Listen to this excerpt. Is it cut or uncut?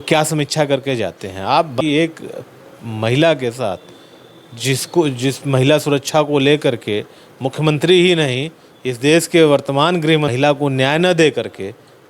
cut